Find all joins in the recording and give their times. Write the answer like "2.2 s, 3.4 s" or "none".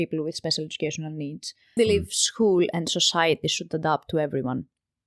1.8 s